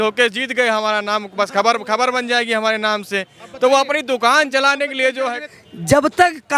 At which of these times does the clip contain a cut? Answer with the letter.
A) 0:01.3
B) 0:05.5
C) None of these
B